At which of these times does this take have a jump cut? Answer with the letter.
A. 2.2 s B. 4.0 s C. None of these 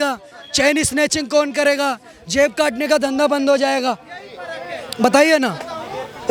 C